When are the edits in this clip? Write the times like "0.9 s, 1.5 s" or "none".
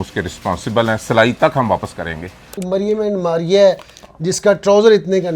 2.6 s